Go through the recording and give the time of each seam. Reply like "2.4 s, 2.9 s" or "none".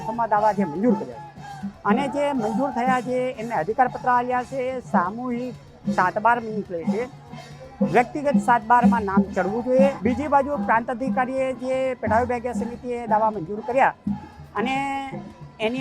10.0 s